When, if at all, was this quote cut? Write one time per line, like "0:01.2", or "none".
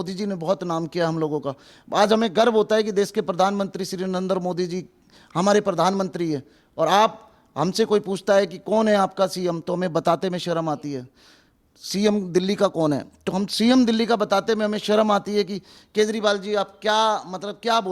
none

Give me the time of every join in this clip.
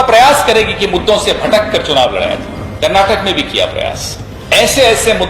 0:02.6
0:04.3

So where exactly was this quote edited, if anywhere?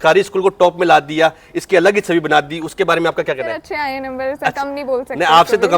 0:03.6

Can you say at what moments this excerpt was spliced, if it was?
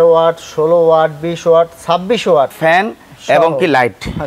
0:02.5

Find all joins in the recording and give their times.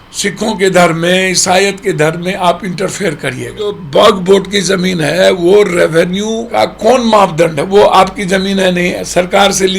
0:03.8
0:06.4

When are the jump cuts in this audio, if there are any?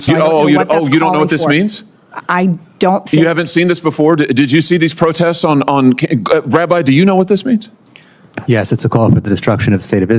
none

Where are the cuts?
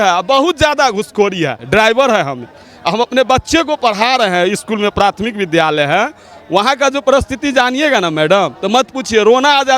0:01.6

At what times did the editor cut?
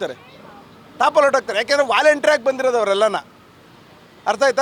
none

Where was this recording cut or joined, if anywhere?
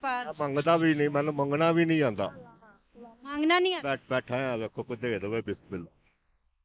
none

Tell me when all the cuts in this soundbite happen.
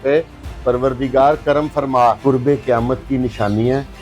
0:02.2

